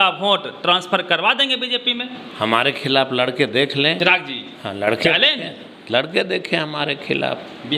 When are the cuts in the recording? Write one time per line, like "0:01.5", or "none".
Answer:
0:04.0